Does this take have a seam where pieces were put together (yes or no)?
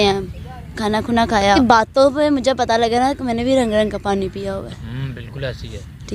yes